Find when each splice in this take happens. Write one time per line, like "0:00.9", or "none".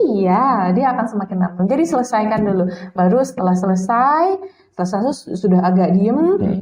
none